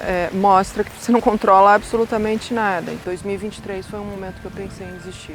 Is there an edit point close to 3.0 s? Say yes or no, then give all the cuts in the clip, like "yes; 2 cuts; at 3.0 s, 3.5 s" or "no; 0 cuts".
yes; 1 cut; at 3.0 s